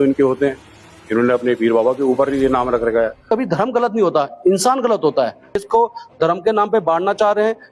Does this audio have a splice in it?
yes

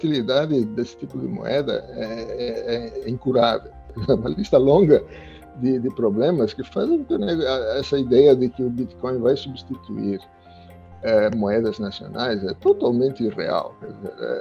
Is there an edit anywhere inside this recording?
yes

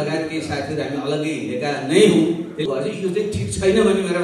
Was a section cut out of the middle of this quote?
yes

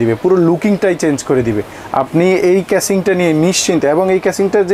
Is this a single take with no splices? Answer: yes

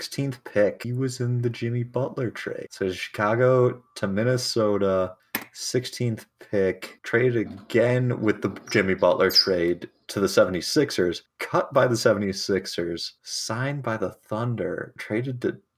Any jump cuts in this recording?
yes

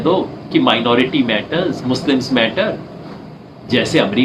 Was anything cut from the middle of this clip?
no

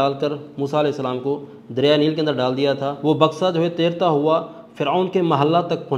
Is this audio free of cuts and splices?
no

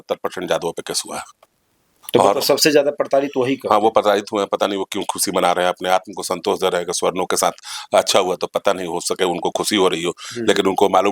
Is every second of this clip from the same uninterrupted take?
yes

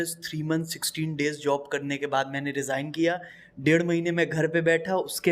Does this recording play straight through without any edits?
yes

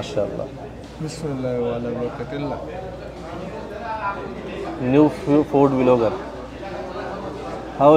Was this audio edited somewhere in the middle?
no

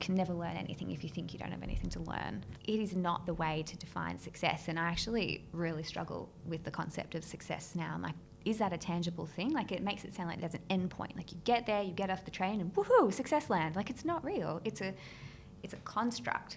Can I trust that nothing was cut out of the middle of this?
no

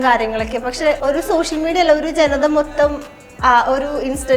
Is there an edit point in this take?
yes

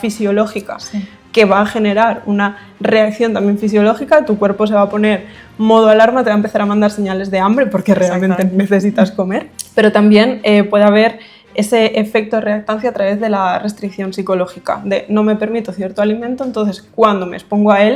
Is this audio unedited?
no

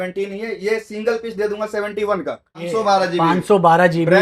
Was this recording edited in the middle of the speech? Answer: yes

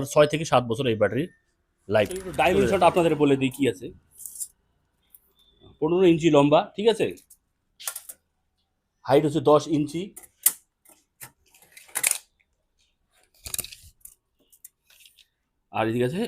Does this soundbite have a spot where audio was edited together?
yes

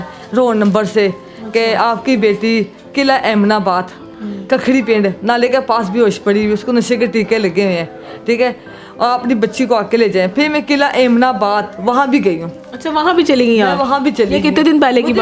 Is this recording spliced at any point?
no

